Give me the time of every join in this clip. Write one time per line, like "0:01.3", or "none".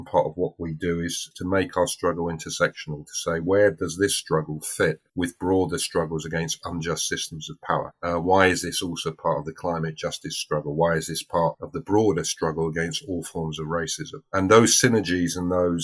0:01.3
0:05.1